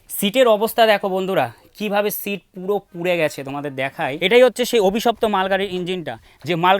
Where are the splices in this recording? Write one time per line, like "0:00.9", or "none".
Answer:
0:04.2